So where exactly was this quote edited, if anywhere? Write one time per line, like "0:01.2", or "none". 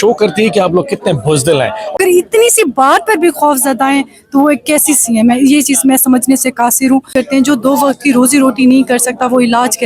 0:02.0
0:07.1